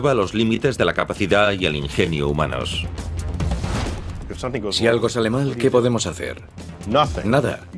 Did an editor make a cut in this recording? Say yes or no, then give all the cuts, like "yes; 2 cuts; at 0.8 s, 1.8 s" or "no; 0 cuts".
no; 0 cuts